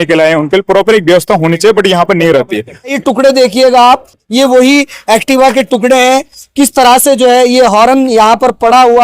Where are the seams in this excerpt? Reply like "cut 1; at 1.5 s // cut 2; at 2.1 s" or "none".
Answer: cut 1; at 3.0 s

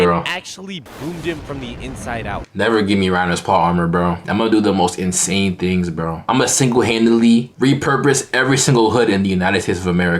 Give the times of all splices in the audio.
cut 1; at 2.5 s

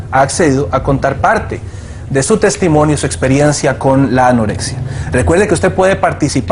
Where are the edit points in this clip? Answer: cut 1; at 1.3 s

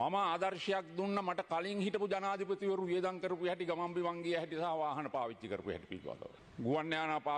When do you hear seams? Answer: cut 1; at 6.4 s

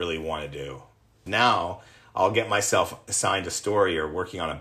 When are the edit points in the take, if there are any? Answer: cut 1; at 1.2 s

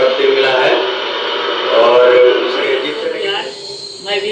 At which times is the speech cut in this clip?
cut 1; at 3.1 s

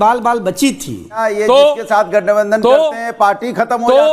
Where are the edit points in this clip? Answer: cut 1; at 1.2 s

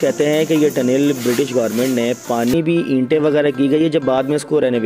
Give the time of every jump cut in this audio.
cut 1; at 2.5 s

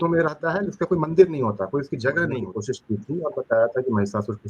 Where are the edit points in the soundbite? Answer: cut 1; at 2.5 s

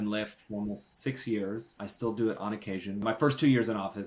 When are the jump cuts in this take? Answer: cut 1; at 1.8 s // cut 2; at 3.0 s

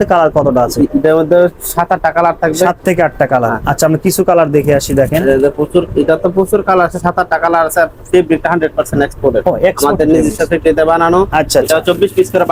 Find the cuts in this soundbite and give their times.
none

